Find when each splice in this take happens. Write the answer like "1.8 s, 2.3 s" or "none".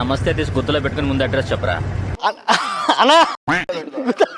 3.3 s